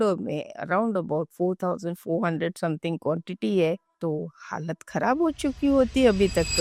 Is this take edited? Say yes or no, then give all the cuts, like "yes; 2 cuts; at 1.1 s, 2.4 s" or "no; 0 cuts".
no; 0 cuts